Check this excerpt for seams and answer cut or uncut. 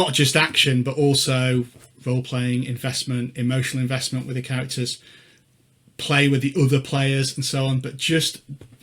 uncut